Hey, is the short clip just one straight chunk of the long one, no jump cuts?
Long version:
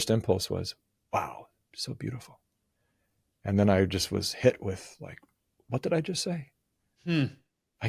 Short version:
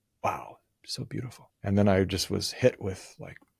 no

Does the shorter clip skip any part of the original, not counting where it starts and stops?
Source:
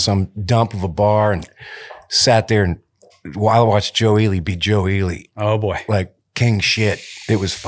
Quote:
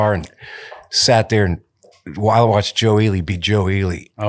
no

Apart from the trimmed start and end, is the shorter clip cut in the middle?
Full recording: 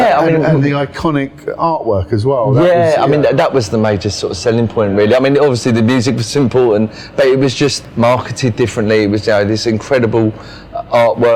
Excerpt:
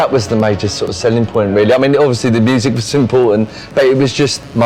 no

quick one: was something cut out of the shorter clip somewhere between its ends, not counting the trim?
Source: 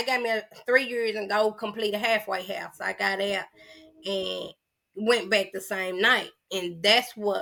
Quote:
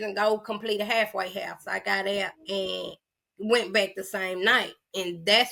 yes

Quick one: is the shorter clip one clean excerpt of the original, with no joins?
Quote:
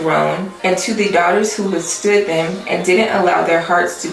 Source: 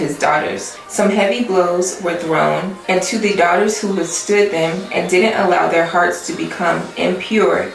yes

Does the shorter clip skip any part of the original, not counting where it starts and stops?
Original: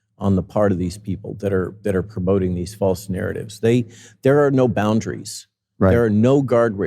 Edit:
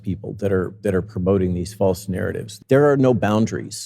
yes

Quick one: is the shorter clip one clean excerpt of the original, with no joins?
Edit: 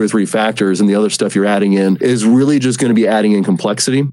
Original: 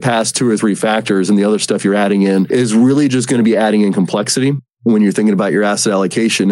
yes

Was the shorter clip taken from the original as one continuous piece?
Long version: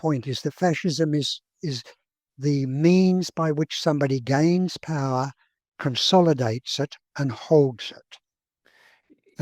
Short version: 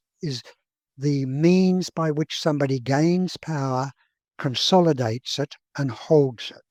yes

